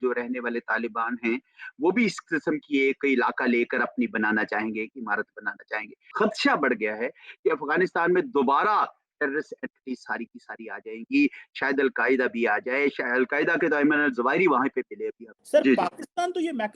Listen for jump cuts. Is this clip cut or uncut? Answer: uncut